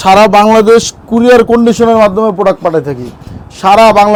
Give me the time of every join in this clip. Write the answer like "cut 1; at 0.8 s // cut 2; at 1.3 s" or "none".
none